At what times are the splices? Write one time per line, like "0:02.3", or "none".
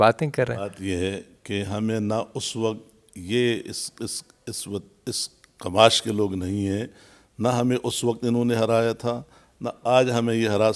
none

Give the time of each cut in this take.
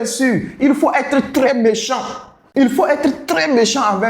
0:02.5

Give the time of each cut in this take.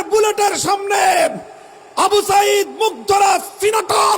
none

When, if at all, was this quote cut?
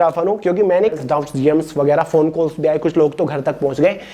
0:01.0

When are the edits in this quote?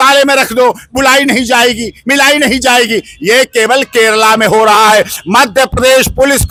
none

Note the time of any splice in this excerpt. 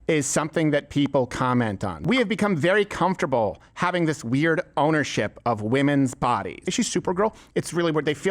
0:01.9
0:06.7

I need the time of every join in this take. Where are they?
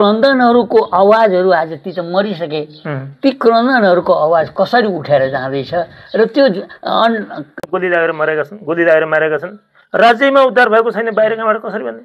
0:07.6

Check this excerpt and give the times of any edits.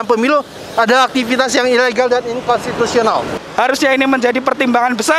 0:03.4

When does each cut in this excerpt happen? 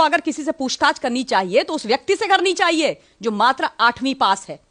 none

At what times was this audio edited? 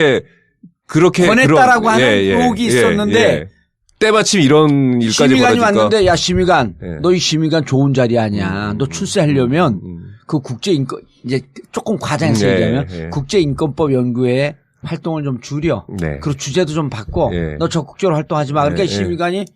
0:17.9

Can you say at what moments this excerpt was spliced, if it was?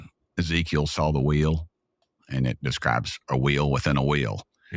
0:02.0

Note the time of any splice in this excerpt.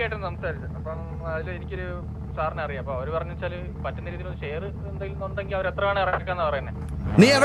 none

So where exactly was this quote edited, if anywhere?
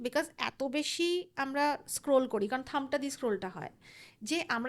none

